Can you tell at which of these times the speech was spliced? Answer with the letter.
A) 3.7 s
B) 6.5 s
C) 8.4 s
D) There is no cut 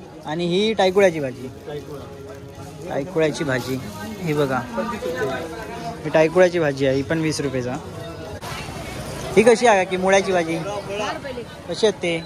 C